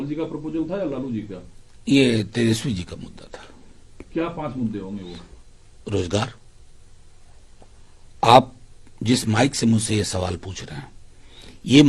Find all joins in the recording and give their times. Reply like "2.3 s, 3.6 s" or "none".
none